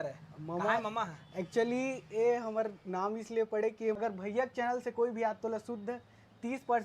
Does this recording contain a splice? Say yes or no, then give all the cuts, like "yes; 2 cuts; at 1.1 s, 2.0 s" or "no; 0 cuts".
yes; 1 cut; at 4.0 s